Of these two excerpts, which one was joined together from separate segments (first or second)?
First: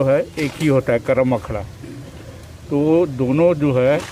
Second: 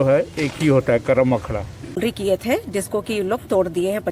second